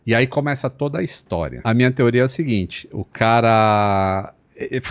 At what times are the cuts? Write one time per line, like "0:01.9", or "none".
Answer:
0:01.6